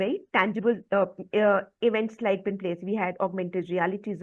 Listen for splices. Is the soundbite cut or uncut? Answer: uncut